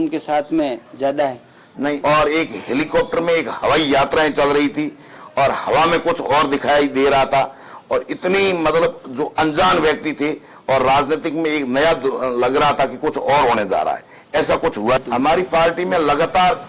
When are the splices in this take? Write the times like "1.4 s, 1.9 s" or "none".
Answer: 2.0 s, 15.0 s